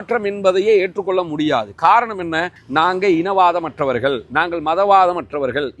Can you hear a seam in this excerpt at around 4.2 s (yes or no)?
no